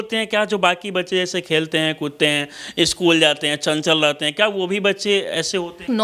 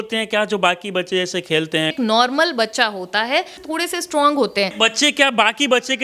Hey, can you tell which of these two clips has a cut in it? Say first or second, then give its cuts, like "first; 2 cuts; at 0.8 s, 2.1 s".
second; 3 cuts; at 1.9 s, 3.6 s, 4.7 s